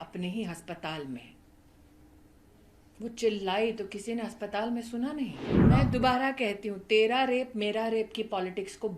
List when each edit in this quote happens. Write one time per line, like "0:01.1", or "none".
0:05.5